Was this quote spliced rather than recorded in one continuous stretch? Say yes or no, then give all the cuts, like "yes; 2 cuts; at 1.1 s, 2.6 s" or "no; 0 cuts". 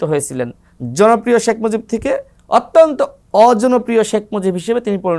no; 0 cuts